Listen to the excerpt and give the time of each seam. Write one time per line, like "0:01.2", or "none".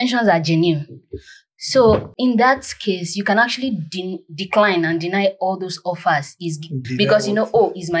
0:02.1
0:06.8